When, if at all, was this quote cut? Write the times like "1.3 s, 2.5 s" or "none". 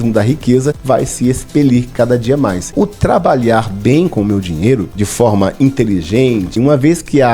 0.8 s, 2.7 s, 5.0 s, 6.6 s